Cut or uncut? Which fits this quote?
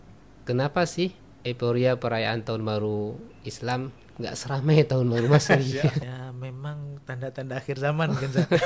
cut